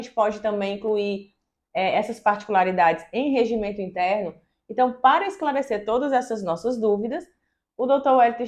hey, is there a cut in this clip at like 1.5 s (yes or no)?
no